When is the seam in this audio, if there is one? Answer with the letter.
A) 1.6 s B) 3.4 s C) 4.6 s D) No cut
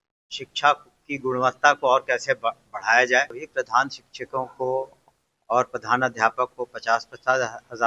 B